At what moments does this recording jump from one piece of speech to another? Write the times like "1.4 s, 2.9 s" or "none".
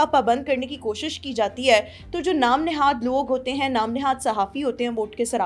none